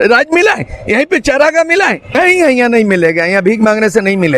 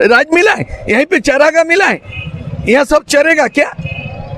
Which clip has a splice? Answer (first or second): first